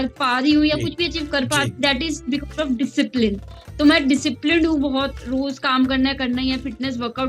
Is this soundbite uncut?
yes; 0 cuts

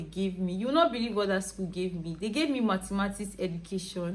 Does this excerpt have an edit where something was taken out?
no; 0 cuts

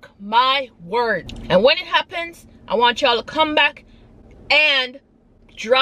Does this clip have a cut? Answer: yes; 1 cut; at 1.3 s

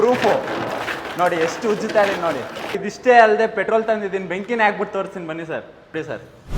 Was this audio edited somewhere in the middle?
yes; 1 cut; at 2.6 s

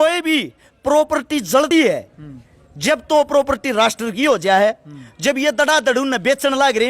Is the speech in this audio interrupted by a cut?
yes; 1 cut; at 1.7 s

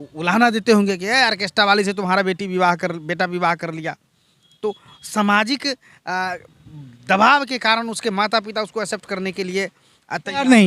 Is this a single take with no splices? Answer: yes; 0 cuts

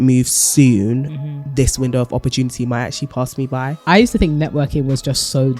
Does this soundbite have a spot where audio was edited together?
yes; 1 cut; at 3.8 s

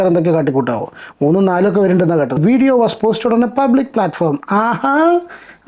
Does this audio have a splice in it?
yes; 1 cut; at 2.4 s

